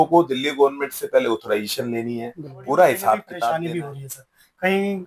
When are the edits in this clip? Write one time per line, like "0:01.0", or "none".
0:03.4